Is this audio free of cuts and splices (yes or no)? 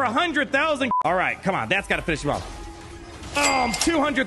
no